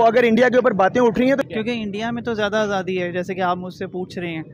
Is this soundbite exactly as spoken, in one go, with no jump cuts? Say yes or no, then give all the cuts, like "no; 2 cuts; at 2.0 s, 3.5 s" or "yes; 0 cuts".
no; 1 cut; at 1.4 s